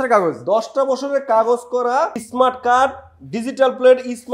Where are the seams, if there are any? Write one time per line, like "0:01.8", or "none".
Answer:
0:02.2